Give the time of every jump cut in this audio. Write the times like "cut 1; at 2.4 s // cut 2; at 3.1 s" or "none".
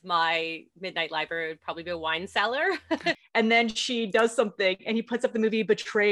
cut 1; at 3.1 s

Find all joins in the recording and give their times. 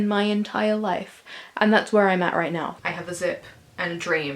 cut 1; at 2.8 s

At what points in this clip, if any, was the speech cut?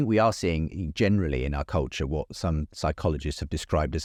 none

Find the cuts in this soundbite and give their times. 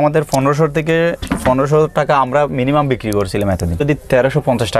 cut 1; at 3.8 s

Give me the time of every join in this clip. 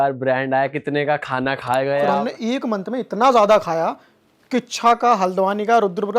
cut 1; at 2.0 s

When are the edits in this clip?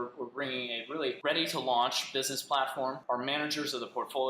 cut 1; at 1.2 s // cut 2; at 3.0 s

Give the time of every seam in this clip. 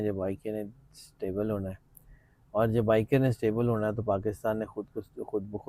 none

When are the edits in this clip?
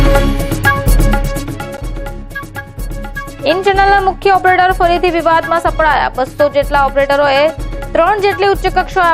cut 1; at 0.9 s

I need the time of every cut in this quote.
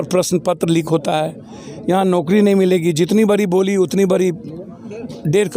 none

